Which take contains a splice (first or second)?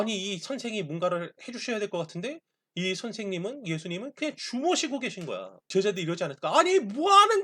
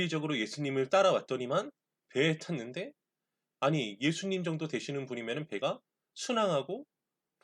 first